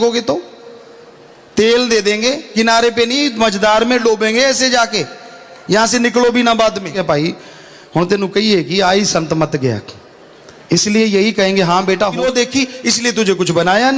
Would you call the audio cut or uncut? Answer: cut